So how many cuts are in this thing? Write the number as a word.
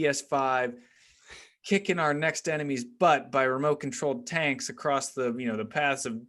zero